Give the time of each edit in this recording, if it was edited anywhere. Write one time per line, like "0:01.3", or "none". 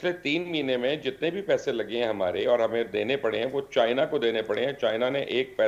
none